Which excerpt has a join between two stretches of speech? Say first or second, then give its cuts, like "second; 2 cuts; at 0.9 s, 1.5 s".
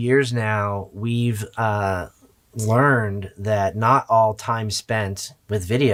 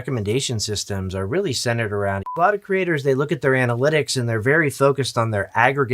second; 1 cut; at 2.4 s